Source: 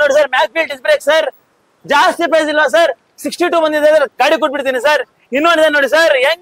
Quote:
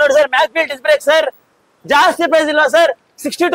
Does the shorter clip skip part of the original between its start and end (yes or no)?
no